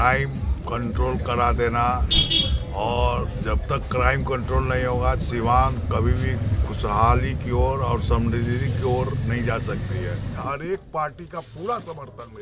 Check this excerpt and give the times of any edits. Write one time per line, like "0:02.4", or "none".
0:10.4